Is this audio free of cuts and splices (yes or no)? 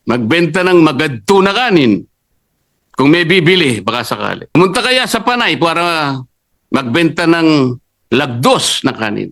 no